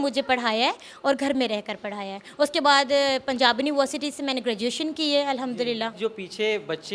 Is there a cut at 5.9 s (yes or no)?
yes